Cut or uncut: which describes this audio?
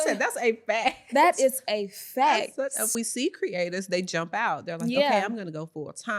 cut